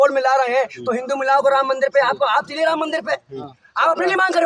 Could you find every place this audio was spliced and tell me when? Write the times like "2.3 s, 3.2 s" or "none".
none